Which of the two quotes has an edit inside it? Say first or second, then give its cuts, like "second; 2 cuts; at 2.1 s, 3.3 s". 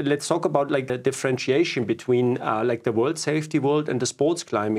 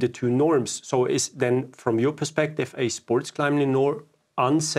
first; 1 cut; at 0.9 s